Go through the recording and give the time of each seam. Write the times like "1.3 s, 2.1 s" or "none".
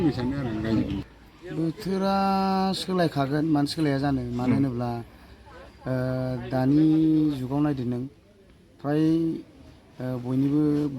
1.0 s